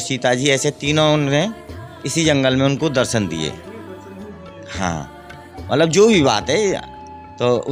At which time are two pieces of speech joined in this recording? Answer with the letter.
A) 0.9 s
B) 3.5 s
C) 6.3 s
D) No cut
D